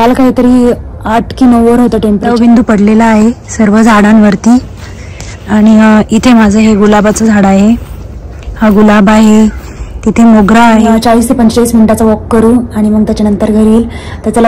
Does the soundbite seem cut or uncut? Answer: cut